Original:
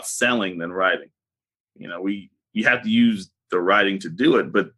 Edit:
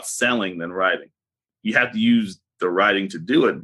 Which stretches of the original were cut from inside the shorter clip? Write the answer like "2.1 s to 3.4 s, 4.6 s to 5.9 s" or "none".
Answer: 1.4 s to 2.3 s